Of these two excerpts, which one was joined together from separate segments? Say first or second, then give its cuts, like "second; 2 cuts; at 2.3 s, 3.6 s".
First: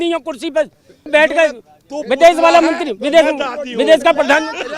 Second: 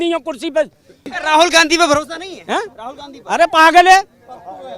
second; 1 cut; at 1.0 s